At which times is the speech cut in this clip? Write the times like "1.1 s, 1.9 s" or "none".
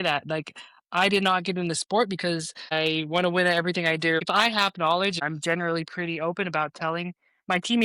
2.7 s, 4.2 s, 5.2 s